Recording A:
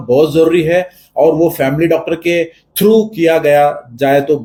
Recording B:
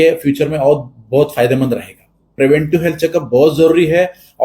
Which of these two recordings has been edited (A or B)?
B